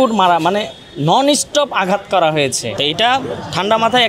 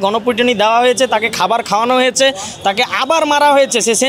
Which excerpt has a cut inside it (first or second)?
first